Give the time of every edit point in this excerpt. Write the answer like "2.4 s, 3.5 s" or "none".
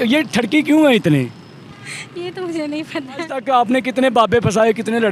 3.4 s